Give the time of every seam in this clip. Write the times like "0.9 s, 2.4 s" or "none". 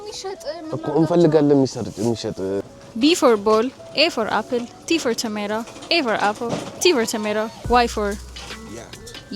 2.8 s